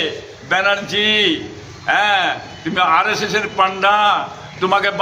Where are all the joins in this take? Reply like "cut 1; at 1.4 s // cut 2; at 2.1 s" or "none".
none